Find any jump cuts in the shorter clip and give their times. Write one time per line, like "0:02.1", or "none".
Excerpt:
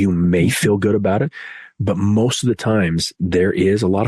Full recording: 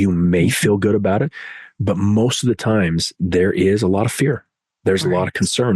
none